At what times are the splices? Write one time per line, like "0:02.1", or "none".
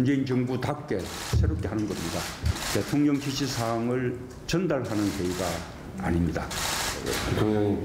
0:05.6